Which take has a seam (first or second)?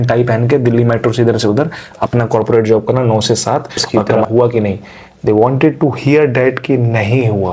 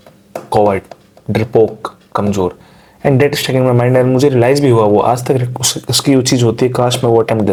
first